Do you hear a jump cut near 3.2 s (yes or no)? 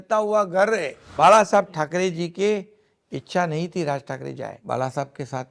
no